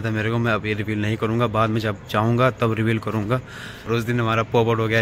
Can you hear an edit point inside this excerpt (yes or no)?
yes